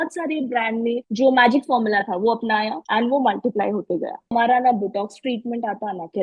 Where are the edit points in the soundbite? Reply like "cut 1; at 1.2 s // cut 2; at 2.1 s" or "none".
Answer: cut 1; at 1.1 s // cut 2; at 2.8 s // cut 3; at 4.3 s